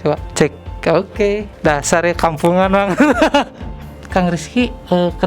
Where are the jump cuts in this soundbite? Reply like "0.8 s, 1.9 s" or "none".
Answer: 3.9 s